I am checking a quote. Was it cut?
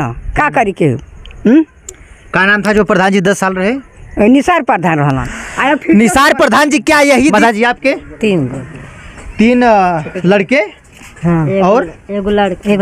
yes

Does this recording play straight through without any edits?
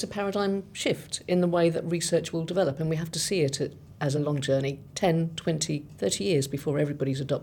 yes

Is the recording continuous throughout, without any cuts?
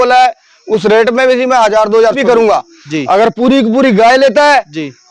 no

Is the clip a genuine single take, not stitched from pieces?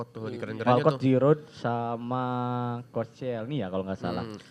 yes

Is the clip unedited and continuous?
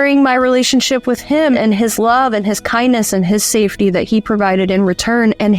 no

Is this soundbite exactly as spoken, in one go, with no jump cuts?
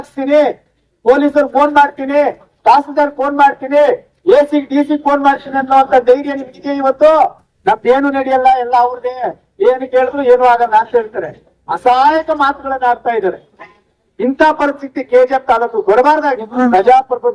no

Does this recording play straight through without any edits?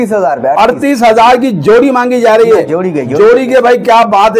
yes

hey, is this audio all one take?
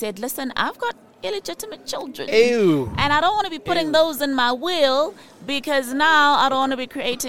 yes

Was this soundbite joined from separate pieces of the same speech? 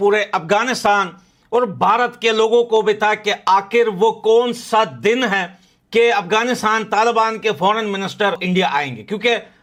no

